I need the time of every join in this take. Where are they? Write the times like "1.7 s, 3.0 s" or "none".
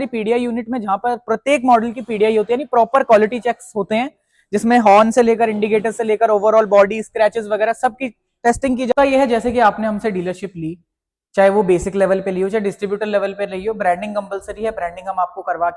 8.9 s